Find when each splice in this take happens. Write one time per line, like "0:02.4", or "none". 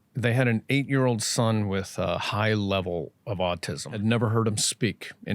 0:04.0

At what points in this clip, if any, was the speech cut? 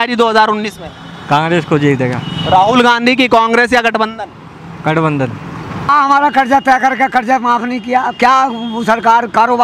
0:05.9

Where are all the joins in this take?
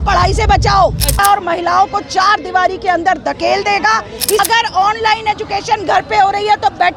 0:01.2
0:04.4

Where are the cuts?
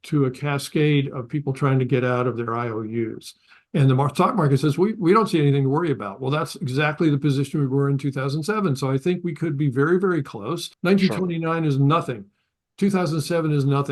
0:03.3
0:10.7

